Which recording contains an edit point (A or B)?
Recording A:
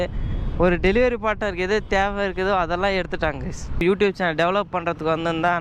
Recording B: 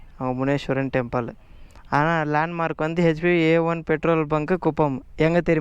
A